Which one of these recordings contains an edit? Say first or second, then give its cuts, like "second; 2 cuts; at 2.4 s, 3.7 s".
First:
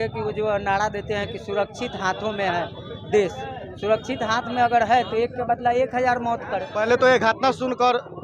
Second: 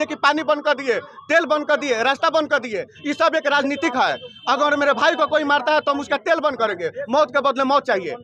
first; 1 cut; at 6.7 s